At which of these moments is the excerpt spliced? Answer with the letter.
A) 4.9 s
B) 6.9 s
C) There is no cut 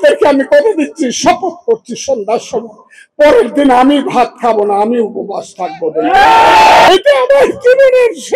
B